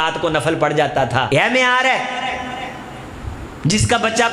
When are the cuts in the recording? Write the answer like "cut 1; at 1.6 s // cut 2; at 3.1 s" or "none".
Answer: cut 1; at 1.3 s